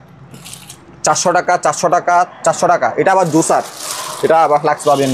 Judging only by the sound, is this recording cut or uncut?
uncut